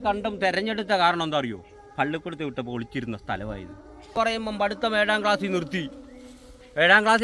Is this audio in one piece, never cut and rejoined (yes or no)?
no